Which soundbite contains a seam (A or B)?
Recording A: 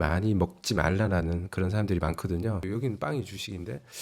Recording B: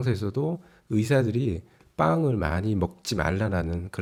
A